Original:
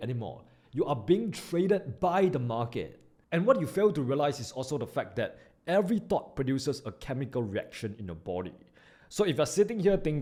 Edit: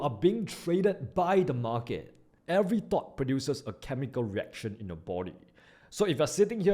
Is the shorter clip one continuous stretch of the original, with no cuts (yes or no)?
no